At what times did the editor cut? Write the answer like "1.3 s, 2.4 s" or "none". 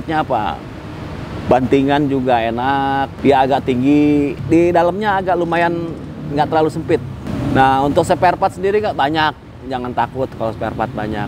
3.1 s, 4.4 s, 7.2 s